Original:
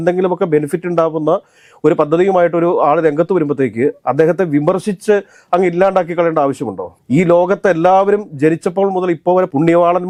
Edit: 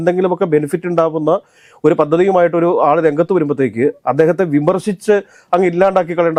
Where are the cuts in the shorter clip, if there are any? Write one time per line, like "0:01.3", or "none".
none